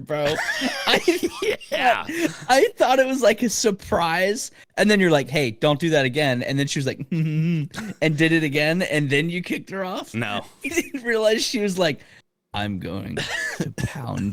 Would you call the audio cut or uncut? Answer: uncut